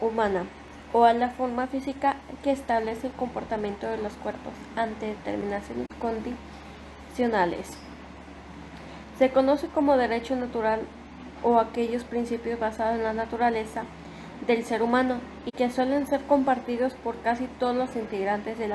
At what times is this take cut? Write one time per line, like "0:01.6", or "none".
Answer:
none